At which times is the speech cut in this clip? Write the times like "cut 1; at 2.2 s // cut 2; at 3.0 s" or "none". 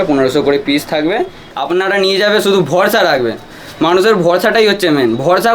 cut 1; at 1.4 s